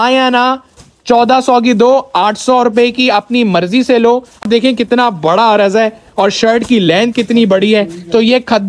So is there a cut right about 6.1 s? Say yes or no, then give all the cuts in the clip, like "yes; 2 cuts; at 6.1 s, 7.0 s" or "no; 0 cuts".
no; 1 cut; at 4.5 s